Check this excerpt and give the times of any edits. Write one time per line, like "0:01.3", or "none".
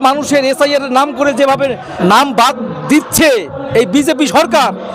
0:01.9